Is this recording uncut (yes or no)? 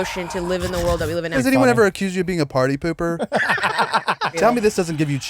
no